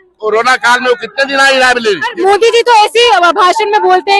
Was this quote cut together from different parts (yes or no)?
yes